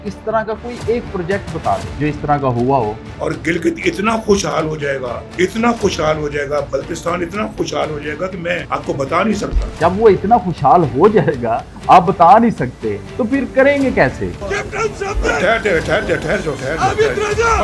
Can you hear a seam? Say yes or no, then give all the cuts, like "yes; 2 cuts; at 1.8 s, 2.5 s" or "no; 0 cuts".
yes; 3 cuts; at 1.9 s, 3.0 s, 14.3 s